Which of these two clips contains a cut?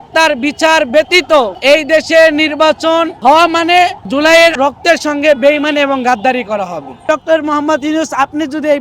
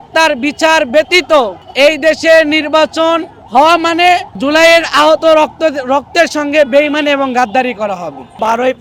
first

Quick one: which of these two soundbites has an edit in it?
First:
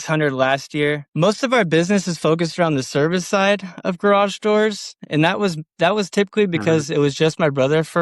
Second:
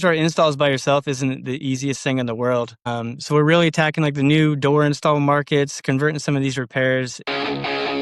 first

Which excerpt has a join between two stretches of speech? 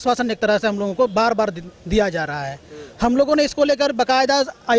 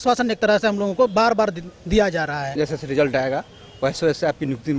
second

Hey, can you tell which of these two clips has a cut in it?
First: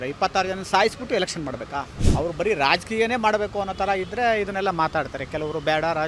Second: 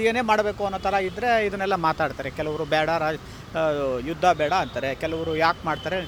first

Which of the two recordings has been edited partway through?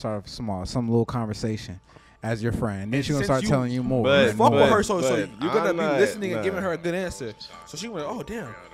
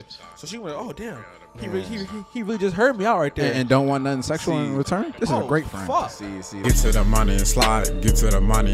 second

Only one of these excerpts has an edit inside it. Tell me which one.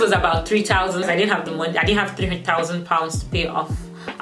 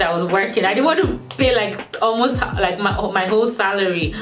first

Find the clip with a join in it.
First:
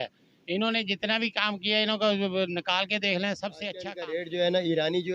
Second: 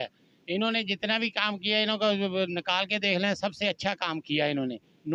first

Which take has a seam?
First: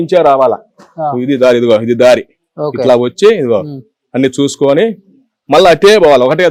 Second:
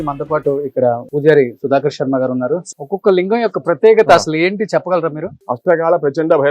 second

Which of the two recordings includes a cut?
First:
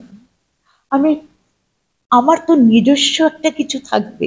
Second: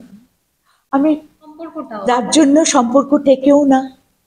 second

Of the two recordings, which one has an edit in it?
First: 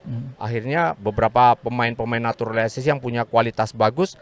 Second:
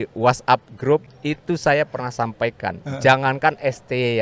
second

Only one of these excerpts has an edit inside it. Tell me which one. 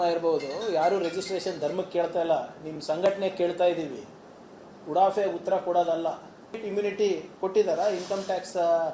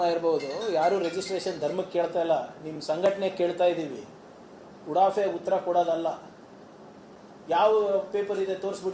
first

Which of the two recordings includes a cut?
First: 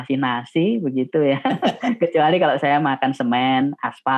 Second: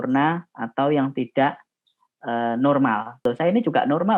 second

